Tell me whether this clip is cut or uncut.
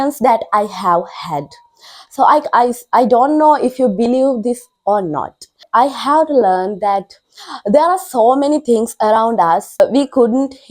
cut